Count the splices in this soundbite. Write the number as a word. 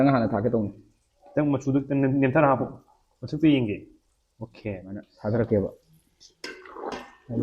one